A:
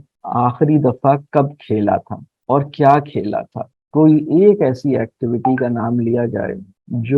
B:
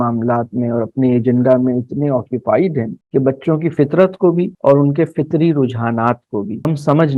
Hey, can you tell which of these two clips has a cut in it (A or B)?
A